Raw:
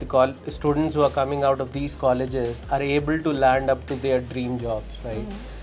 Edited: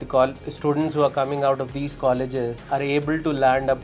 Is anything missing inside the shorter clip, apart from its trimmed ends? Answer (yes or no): no